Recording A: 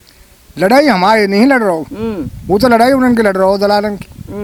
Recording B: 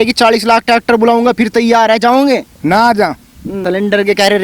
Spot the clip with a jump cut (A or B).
B